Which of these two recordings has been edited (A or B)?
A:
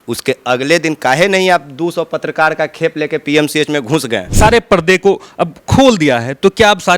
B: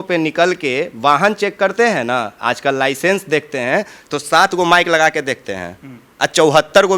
A